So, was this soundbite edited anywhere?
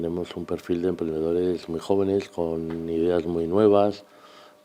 no; 0 cuts

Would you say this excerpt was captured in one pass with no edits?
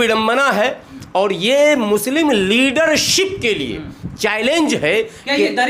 yes; 0 cuts

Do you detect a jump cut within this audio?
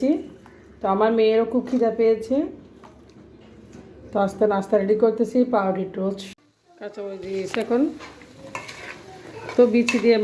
yes; 1 cut; at 6.3 s

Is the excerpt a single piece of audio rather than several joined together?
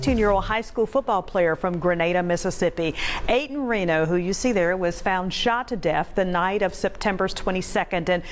yes; 0 cuts

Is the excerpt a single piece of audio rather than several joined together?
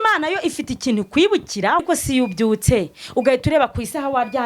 no; 1 cut; at 1.8 s

